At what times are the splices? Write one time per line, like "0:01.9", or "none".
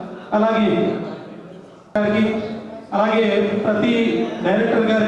0:01.9